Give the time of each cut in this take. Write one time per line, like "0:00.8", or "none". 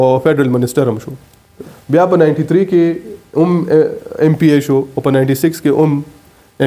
0:01.6